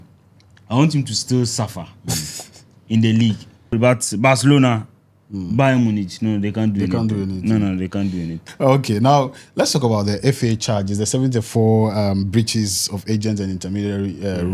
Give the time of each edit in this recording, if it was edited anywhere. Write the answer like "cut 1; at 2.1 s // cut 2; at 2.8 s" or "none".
cut 1; at 3.7 s // cut 2; at 8.4 s